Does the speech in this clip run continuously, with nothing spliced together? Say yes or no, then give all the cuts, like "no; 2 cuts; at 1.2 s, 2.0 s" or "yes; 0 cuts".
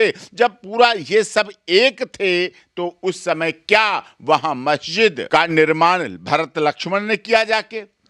no; 1 cut; at 5.2 s